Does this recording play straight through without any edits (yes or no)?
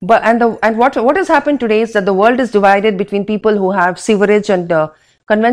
yes